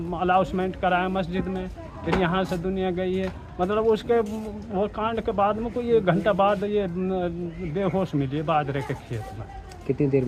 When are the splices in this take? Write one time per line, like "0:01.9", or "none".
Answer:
none